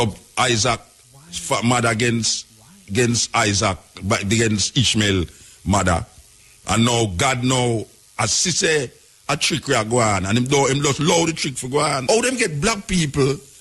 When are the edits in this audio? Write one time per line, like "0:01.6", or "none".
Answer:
0:12.0